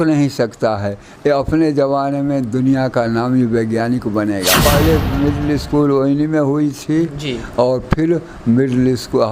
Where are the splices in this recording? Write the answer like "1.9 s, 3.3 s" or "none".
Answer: 4.6 s